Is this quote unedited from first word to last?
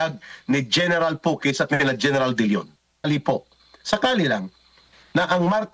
no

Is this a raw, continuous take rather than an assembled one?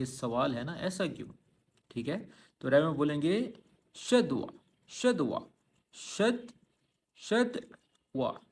yes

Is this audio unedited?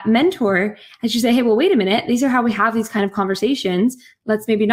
yes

